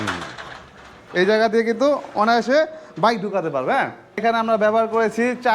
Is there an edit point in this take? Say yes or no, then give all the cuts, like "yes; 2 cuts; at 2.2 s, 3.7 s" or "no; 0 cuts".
yes; 2 cuts; at 0.9 s, 4.2 s